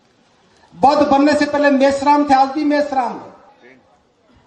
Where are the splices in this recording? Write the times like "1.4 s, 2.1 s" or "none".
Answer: 3.5 s